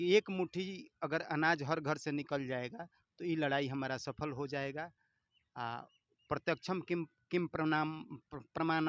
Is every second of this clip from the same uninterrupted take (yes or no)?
yes